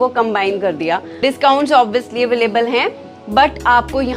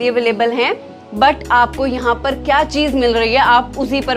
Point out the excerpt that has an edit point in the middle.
first; 1 cut; at 1.1 s

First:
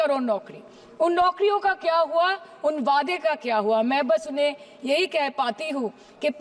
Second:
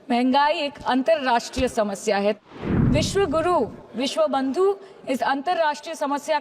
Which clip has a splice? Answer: second; 1 cut; at 2.4 s

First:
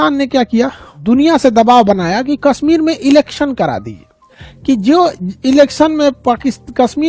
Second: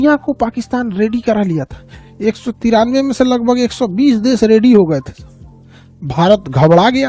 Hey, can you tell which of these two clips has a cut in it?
first; 1 cut; at 0.9 s

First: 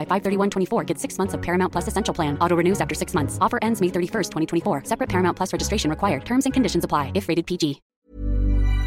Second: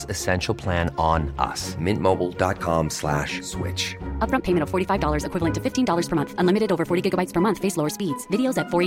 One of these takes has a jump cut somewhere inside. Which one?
first; 1 cut; at 7.9 s

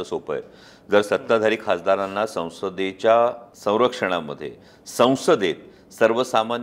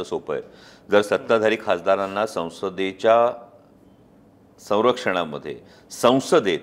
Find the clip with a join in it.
first; 1 cut; at 3.5 s

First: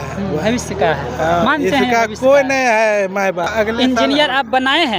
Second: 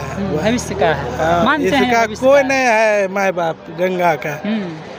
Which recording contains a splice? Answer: first; 1 cut; at 3.5 s

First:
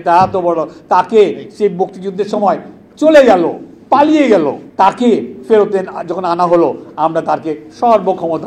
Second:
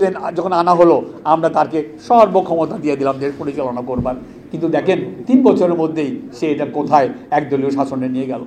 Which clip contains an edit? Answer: first; 2 cuts; at 3.7 s, 4.6 s

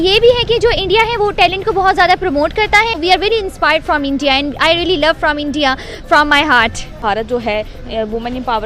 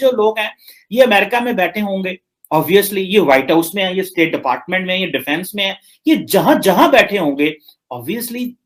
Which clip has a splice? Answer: first; 2 cuts; at 2.9 s, 7.0 s

